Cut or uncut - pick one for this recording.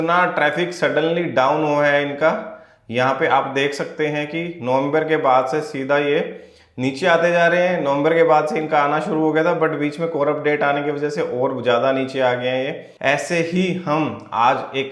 uncut